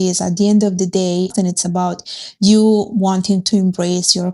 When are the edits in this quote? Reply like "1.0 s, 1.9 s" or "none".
1.3 s